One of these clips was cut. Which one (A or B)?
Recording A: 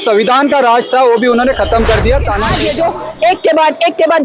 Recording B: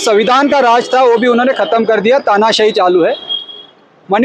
A